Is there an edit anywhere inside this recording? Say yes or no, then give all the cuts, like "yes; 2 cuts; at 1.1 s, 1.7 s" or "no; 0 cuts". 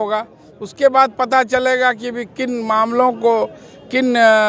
no; 0 cuts